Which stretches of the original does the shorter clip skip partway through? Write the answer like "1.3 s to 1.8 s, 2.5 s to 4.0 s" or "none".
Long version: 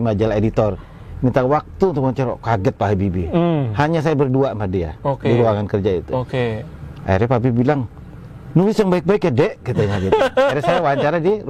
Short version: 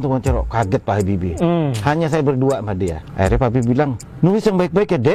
4.9 s to 6.9 s, 7.9 s to 8.4 s